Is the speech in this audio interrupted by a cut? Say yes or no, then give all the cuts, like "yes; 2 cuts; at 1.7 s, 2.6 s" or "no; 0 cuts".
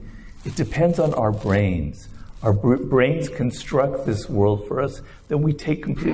no; 0 cuts